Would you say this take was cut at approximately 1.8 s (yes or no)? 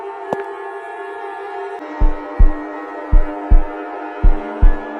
yes